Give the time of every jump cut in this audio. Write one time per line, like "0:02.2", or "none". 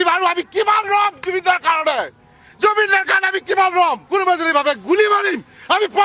0:04.0